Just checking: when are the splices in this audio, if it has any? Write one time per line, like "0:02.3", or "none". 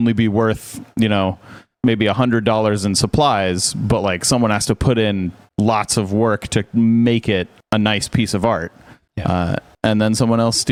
none